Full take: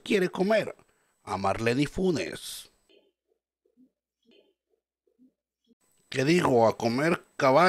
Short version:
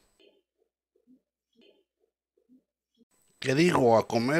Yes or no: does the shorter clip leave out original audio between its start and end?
no